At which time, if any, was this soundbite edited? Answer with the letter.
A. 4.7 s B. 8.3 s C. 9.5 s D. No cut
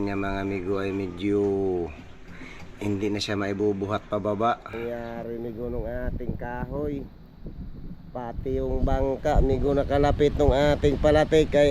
A